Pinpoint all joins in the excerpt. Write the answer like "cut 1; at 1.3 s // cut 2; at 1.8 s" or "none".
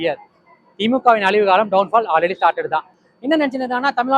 cut 1; at 3.0 s

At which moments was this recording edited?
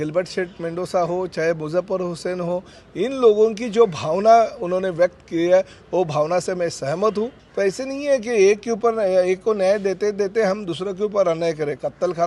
cut 1; at 7.4 s

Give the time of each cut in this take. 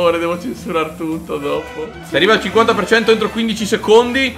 cut 1; at 2.0 s

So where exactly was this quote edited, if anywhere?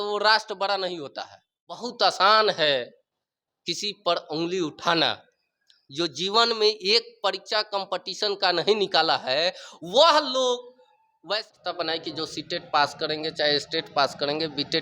cut 1; at 1.9 s // cut 2; at 11.5 s

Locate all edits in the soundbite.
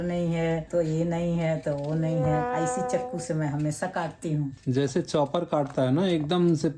cut 1; at 4.6 s

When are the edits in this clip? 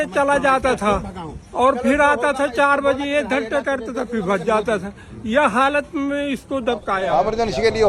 cut 1; at 7.0 s

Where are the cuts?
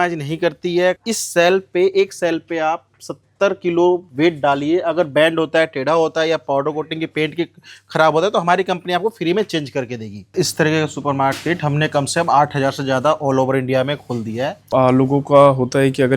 cut 1; at 1.0 s // cut 2; at 10.3 s // cut 3; at 14.7 s

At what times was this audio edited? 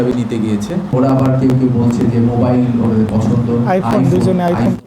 cut 1; at 0.9 s

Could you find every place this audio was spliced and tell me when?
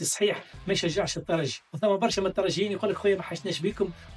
cut 1; at 1.6 s

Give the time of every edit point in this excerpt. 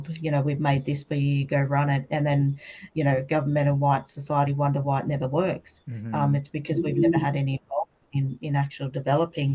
none

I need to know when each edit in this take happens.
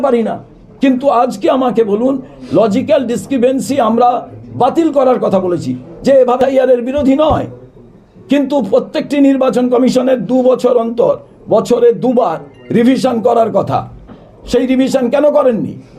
cut 1; at 6.4 s

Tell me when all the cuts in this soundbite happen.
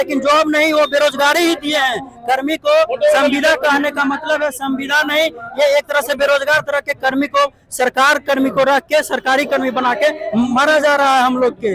none

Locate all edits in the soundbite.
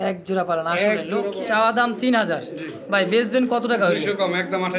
cut 1; at 1.3 s

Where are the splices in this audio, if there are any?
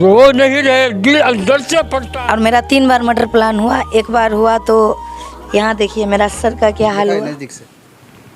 cut 1; at 2.0 s

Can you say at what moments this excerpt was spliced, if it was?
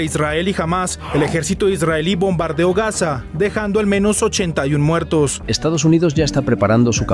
cut 1; at 5.4 s

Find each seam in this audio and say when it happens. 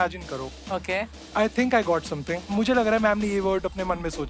cut 1; at 1.2 s // cut 2; at 2.5 s

